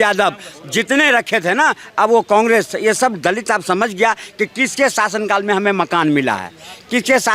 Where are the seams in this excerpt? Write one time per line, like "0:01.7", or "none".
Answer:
none